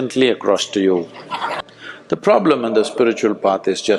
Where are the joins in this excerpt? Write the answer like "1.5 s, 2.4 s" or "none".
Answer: 1.5 s